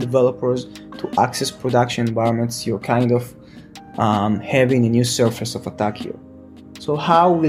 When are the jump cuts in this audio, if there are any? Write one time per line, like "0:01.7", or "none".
none